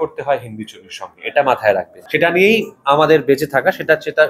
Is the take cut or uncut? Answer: cut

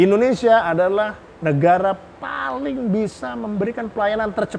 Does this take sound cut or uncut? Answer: uncut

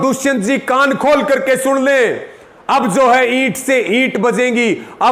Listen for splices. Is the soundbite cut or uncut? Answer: uncut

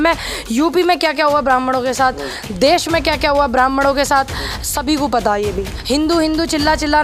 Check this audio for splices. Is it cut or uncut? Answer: cut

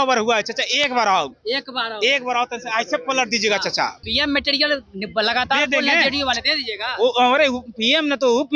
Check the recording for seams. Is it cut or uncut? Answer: cut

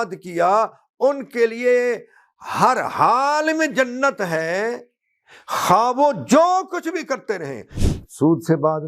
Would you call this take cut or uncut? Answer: cut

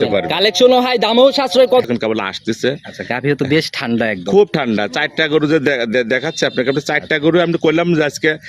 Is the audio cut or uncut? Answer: cut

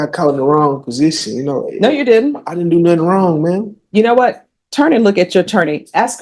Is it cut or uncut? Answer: uncut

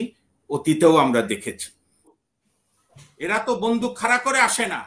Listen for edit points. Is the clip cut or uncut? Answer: cut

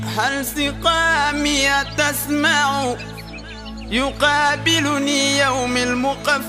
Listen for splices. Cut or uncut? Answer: uncut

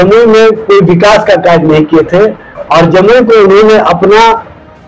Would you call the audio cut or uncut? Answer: uncut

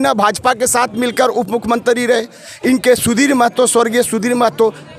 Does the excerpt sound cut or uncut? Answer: uncut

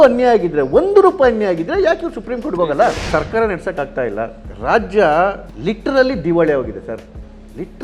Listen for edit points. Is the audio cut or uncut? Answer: cut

